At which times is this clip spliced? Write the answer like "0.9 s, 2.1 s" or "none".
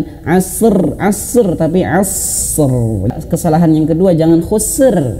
3.1 s